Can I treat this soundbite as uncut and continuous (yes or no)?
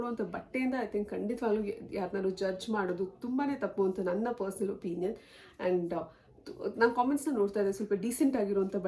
yes